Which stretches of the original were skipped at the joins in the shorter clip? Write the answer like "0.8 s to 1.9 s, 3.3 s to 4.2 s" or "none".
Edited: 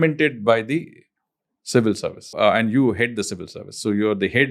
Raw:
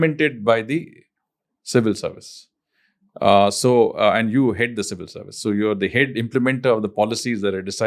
2.3 s to 3.9 s